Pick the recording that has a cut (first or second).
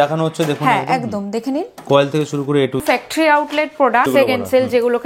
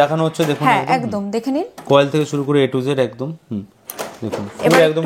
first